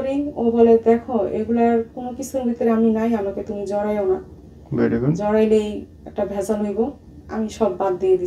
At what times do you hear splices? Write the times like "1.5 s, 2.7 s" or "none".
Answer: none